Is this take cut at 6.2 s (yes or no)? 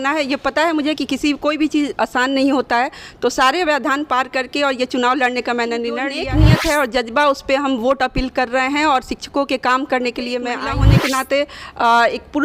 yes